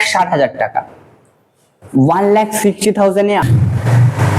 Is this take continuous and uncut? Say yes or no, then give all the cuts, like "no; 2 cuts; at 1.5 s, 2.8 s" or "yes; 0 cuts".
no; 1 cut; at 3.4 s